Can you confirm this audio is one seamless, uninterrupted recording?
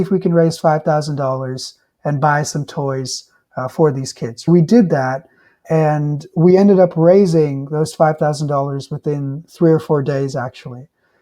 no; 2 cuts; at 4.5 s, 5.6 s

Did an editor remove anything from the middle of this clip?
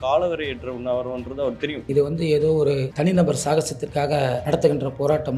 yes; 2 cuts; at 2.9 s, 4.4 s

